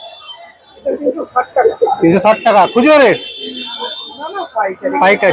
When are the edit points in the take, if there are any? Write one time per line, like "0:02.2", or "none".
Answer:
none